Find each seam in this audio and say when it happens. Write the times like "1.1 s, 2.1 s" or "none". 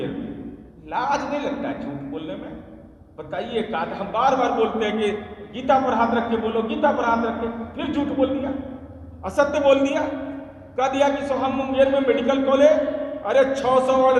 none